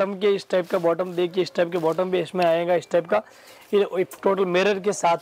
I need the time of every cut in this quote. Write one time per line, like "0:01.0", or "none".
none